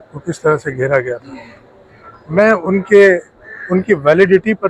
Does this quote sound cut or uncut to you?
uncut